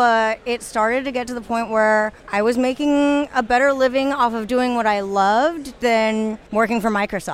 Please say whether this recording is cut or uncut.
cut